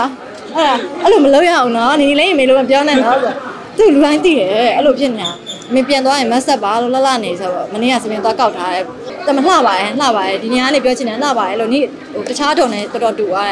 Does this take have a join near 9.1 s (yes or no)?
yes